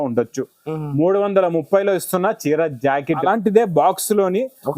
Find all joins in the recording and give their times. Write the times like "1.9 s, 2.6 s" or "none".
3.2 s

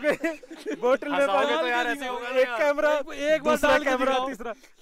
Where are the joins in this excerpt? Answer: none

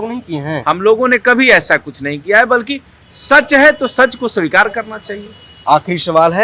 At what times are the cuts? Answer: none

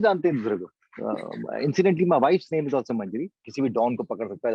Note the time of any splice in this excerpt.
3.4 s

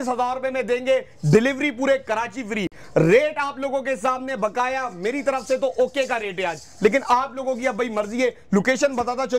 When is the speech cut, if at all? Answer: none

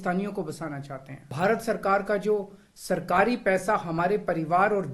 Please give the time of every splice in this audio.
1.2 s

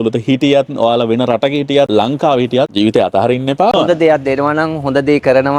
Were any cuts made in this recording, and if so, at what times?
none

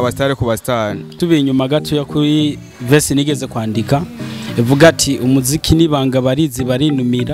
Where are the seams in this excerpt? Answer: 1.0 s

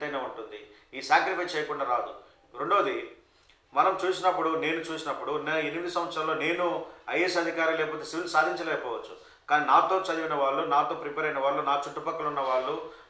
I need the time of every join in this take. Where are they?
none

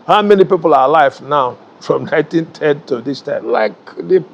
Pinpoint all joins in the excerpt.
3.4 s

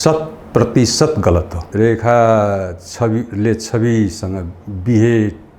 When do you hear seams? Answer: 1.6 s

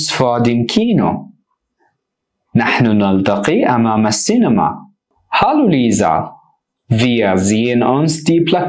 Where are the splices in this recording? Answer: 1.3 s

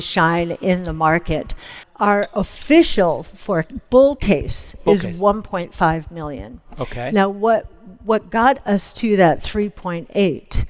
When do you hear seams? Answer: 1.8 s

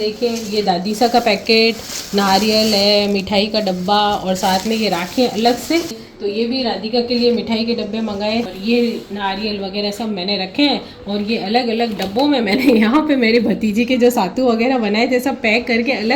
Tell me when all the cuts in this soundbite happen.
6.0 s, 8.5 s

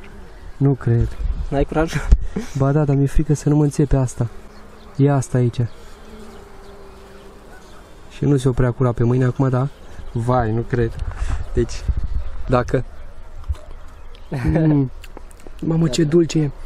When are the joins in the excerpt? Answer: none

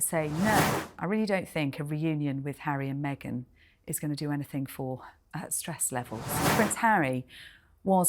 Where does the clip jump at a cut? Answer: 0.9 s, 6.5 s

